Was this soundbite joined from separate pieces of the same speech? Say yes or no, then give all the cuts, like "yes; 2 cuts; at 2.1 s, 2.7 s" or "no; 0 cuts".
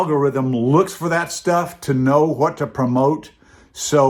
no; 0 cuts